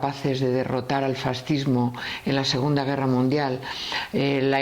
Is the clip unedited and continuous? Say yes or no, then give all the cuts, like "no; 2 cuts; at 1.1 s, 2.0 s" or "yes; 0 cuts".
yes; 0 cuts